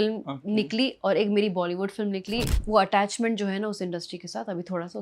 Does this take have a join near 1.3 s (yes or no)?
no